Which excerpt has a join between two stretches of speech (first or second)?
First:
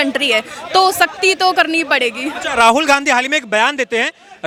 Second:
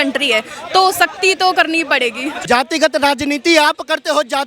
second